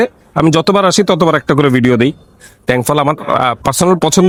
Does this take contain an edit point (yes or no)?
no